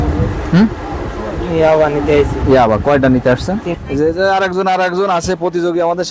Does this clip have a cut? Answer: yes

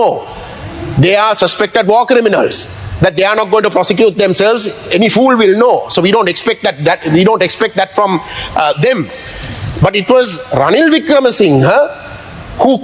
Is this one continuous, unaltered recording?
yes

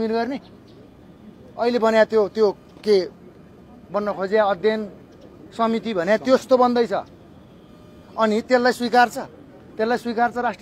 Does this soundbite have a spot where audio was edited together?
no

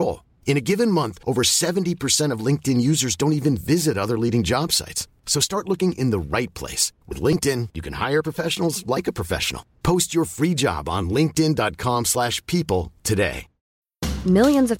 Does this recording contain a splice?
no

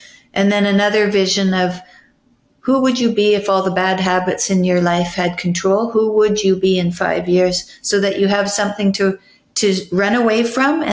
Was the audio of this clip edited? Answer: no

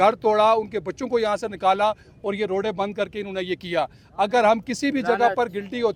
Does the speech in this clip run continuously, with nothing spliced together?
yes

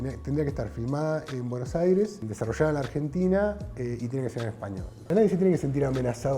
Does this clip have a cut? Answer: yes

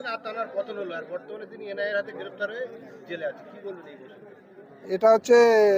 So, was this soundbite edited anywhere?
yes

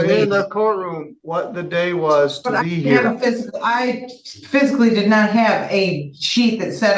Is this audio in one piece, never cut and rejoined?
yes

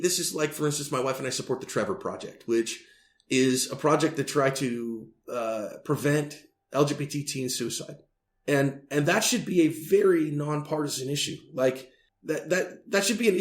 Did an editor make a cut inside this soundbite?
no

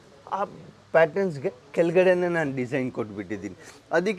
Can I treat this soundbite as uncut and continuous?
yes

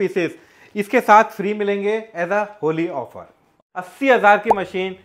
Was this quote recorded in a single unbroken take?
no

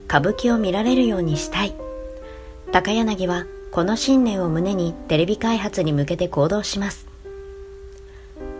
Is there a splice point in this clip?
yes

